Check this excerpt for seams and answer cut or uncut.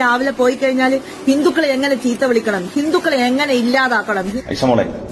uncut